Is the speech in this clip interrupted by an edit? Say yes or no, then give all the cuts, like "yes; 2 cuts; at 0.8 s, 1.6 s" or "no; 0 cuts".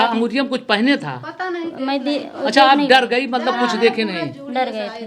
no; 0 cuts